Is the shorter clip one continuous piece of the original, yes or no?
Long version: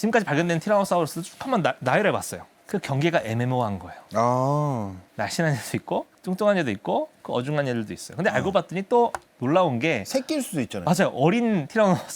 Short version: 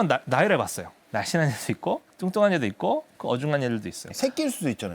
no